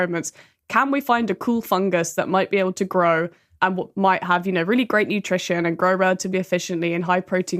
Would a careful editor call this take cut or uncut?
uncut